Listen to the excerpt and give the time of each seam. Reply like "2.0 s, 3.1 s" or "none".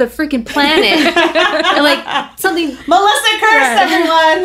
none